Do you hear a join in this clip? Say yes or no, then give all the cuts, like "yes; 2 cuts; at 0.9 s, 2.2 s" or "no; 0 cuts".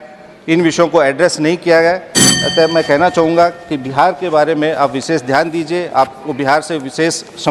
no; 0 cuts